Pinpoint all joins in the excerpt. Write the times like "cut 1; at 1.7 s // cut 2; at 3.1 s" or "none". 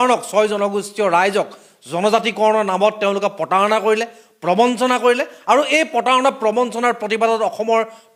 none